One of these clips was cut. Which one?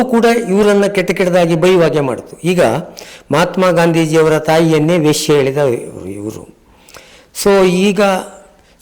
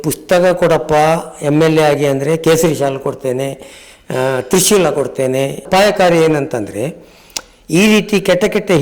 second; 1 cut; at 5.6 s

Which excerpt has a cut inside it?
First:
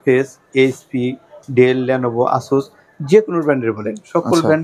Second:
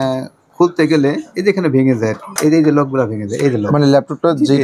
second; 1 cut; at 2.3 s

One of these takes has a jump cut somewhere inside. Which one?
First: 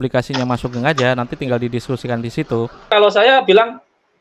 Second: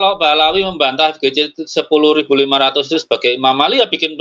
first; 1 cut; at 2.9 s

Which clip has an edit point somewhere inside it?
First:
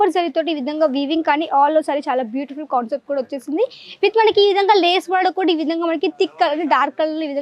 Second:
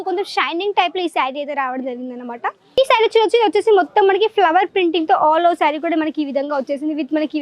second; 1 cut; at 2.8 s

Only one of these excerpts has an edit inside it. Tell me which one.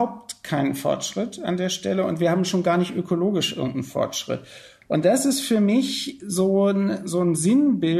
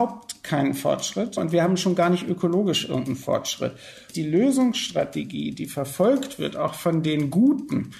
second; 2 cuts; at 1.4 s, 4.1 s

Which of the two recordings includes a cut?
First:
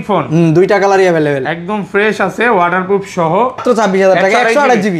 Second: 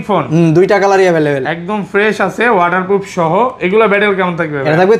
first; 1 cut; at 3.6 s

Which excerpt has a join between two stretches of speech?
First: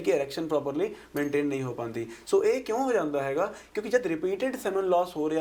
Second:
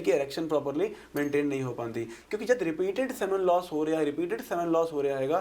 second; 1 cut; at 2.2 s

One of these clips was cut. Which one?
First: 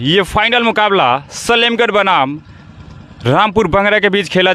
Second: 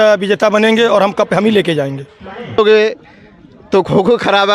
second; 1 cut; at 2.6 s

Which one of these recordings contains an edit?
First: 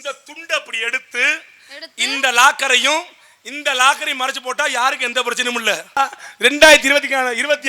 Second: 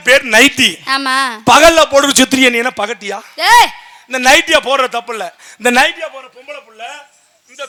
first; 1 cut; at 6.0 s

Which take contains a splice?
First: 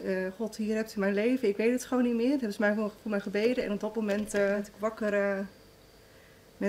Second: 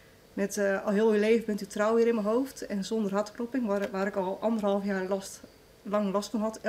first; 1 cut; at 4.7 s

